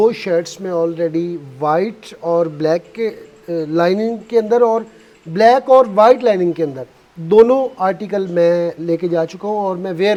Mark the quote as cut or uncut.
uncut